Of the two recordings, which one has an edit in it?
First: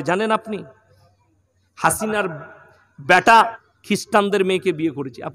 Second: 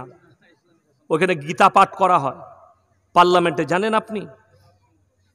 first; 1 cut; at 3.7 s

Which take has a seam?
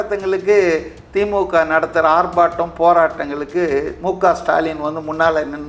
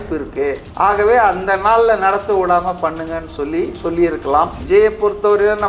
second; 1 cut; at 4.6 s

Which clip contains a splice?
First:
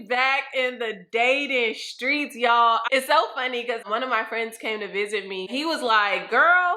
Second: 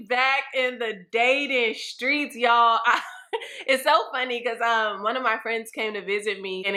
first; 3 cuts; at 2.8 s, 3.8 s, 5.5 s

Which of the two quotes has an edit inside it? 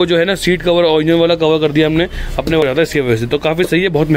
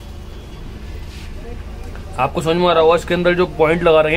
first; 1 cut; at 2.6 s

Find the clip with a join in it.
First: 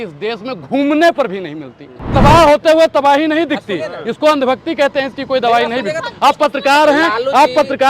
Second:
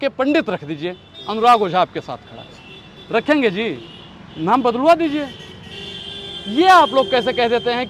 first; 1 cut; at 2.1 s

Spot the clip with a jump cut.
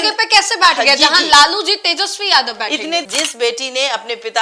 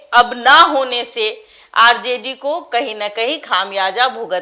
first; 1 cut; at 3.1 s

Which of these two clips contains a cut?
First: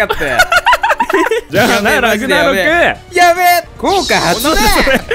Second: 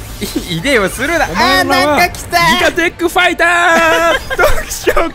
first; 2 cuts; at 1.5 s, 3.7 s

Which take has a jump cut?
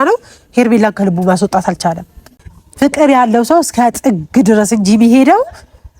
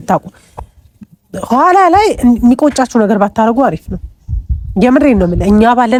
first; 1 cut; at 2.4 s

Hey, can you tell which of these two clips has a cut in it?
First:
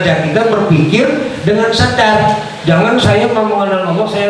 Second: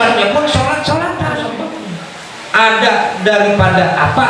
second; 2 cuts; at 1.5 s, 2.7 s

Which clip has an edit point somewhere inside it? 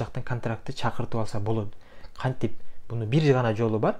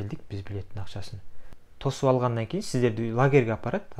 second; 1 cut; at 1.7 s

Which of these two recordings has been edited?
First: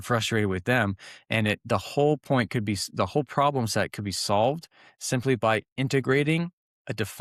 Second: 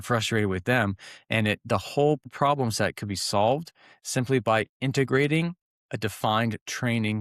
second; 1 cut; at 2.3 s

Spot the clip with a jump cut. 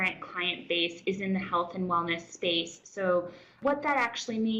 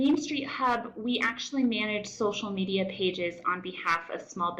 first; 1 cut; at 3.5 s

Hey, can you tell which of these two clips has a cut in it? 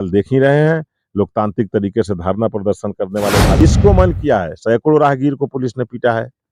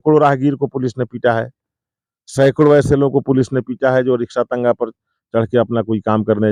first; 1 cut; at 3.6 s

